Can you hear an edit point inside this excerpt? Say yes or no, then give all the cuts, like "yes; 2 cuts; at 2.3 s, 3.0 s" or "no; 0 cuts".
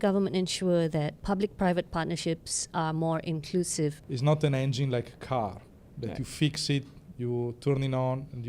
yes; 2 cuts; at 1.2 s, 4.0 s